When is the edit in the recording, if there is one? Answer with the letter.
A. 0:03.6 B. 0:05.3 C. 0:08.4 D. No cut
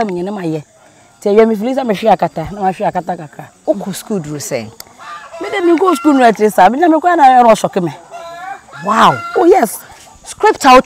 A